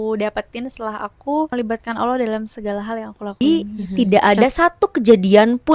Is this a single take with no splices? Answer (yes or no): no